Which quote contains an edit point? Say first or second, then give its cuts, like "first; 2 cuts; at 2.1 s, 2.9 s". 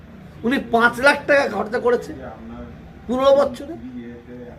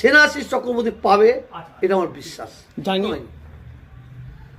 second; 1 cut; at 3.1 s